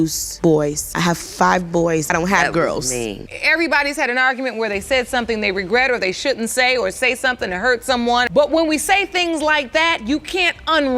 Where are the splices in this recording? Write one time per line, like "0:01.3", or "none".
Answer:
0:02.1
0:03.3
0:08.3